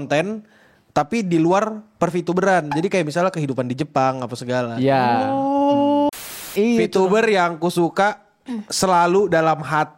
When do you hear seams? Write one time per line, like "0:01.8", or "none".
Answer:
0:06.1